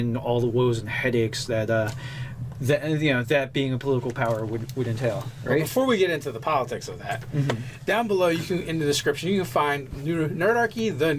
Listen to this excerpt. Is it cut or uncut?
uncut